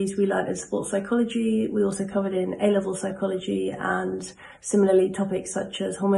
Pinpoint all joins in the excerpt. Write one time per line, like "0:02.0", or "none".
none

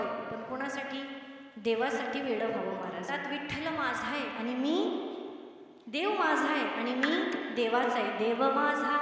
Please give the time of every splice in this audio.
0:03.1

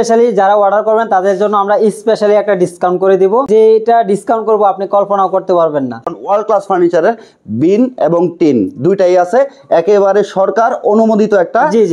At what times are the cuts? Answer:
0:03.5
0:06.1

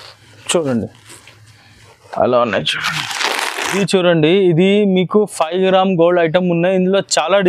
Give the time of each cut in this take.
0:03.6

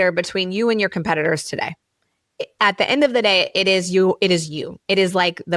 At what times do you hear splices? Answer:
none

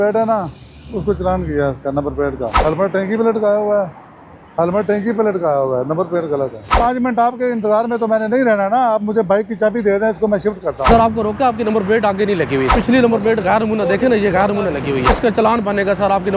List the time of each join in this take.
0:02.6
0:06.8
0:10.9
0:12.8
0:15.2

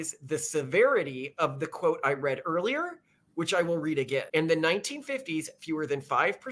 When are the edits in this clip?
0:04.3

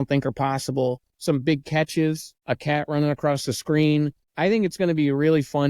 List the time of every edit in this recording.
0:01.1
0:02.3
0:04.2

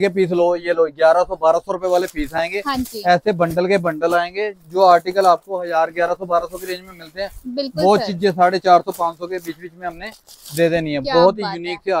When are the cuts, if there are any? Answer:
none

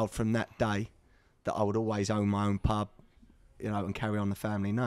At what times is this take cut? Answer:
none

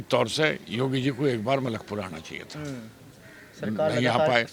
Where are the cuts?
none

